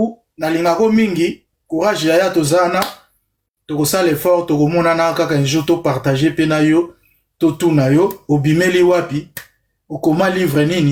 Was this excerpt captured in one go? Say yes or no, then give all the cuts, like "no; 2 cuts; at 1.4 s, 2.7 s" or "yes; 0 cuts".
yes; 0 cuts